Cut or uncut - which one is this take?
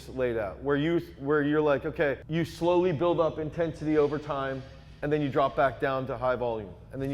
cut